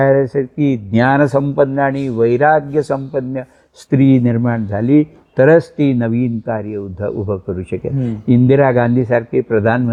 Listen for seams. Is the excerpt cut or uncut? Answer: uncut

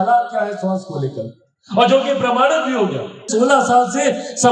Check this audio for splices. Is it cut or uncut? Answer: cut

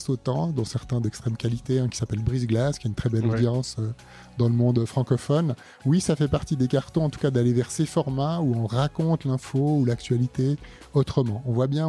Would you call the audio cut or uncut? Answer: uncut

